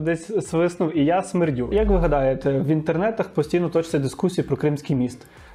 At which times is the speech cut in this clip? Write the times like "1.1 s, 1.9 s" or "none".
1.7 s

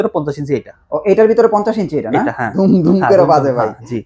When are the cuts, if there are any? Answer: 2.5 s

